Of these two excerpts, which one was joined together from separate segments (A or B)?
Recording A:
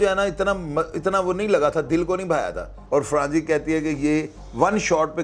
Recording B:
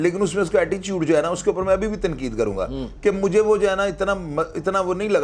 A